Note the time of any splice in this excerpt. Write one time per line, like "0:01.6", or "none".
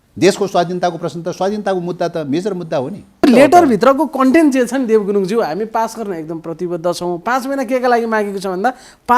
0:03.2